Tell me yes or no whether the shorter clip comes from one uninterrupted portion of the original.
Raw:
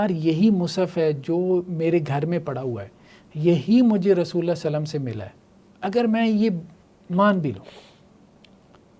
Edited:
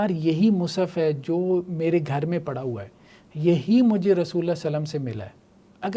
yes